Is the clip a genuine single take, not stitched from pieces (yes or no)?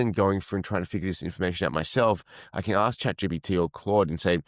yes